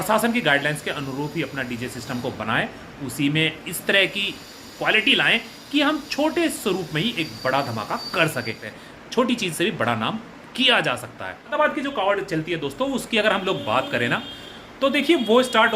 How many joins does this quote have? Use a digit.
2